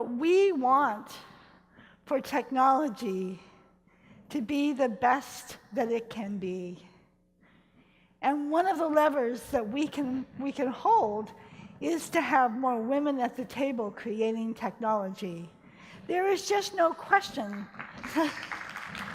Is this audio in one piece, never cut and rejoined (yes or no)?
no